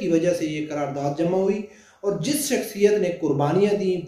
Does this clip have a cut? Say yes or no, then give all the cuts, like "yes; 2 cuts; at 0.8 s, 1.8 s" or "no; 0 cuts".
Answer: no; 0 cuts